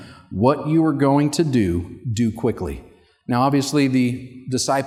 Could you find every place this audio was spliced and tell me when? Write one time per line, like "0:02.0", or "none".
none